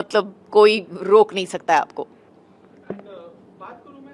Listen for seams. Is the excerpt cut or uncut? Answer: uncut